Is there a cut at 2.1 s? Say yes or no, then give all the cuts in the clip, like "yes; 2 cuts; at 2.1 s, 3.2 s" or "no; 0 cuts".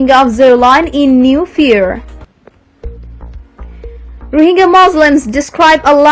yes; 2 cuts; at 2.1 s, 3.7 s